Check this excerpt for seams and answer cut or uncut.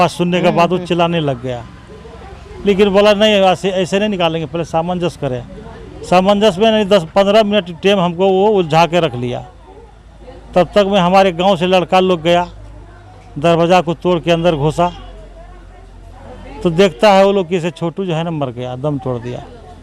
uncut